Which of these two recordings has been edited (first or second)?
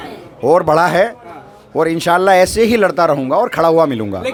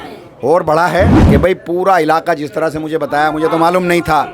second